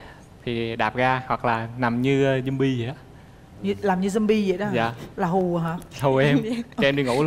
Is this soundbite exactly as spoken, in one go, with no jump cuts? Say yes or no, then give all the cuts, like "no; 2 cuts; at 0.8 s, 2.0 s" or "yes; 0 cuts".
yes; 0 cuts